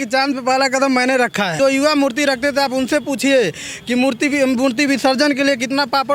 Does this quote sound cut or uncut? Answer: cut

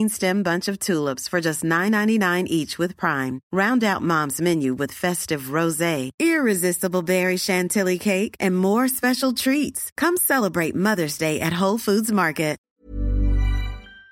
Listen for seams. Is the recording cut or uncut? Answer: cut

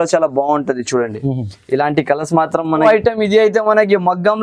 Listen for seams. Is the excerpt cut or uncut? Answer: cut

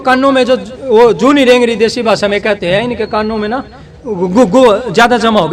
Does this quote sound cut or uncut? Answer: uncut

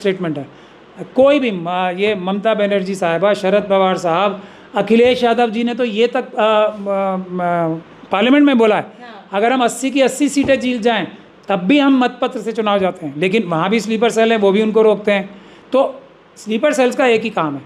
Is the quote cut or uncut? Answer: uncut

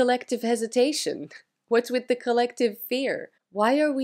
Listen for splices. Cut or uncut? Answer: uncut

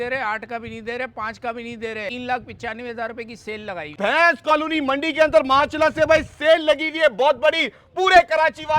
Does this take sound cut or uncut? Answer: cut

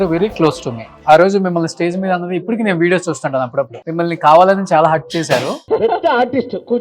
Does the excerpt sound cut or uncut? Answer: cut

